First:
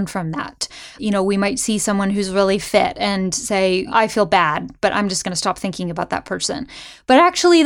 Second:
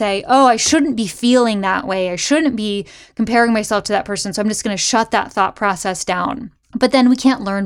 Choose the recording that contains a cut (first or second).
first